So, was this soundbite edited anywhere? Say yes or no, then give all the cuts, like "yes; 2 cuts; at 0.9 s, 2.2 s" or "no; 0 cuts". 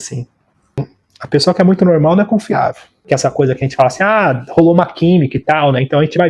yes; 2 cuts; at 0.9 s, 2.9 s